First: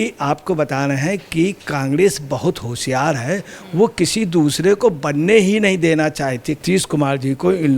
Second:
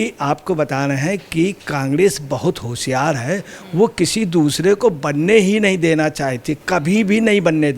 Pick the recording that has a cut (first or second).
first